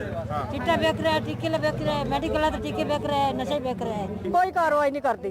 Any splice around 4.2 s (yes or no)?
yes